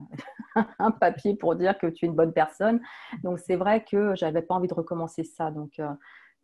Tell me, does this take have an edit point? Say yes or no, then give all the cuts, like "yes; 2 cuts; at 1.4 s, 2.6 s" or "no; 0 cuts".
no; 0 cuts